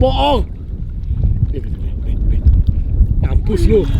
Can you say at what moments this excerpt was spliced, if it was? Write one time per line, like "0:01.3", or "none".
none